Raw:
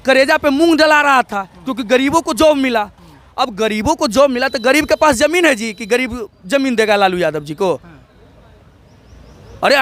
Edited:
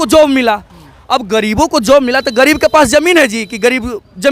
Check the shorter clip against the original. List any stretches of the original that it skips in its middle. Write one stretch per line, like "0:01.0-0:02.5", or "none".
none